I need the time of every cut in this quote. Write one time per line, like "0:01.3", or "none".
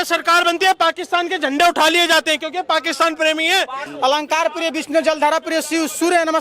0:03.8